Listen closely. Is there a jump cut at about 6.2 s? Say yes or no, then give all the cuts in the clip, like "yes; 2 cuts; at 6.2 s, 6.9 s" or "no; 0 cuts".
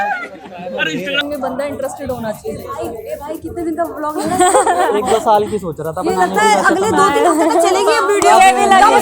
no; 1 cut; at 1.2 s